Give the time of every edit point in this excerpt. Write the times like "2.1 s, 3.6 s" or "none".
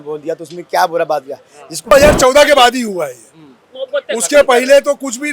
1.9 s